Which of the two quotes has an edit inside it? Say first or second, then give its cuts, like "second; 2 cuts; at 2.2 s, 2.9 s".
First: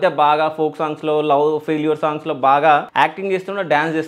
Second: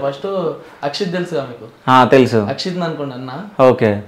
first; 1 cut; at 2.9 s